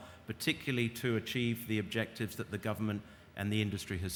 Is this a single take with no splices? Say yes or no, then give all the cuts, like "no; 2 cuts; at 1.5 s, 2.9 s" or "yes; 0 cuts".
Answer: yes; 0 cuts